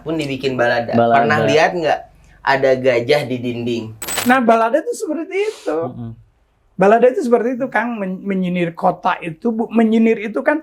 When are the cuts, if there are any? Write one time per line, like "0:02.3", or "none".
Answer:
0:04.1